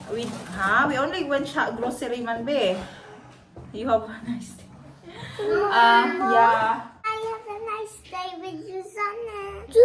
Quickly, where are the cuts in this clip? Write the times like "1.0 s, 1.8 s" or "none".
7.1 s

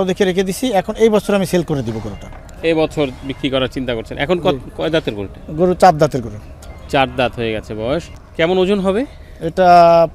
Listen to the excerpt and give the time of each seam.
none

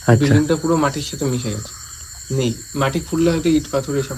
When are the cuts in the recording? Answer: none

